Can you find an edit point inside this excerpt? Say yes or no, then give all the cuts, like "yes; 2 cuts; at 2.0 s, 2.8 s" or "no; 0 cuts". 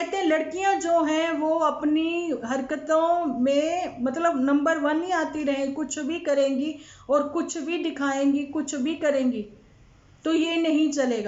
no; 0 cuts